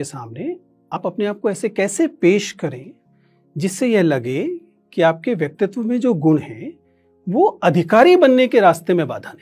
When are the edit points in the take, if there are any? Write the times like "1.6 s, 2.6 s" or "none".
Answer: 1.0 s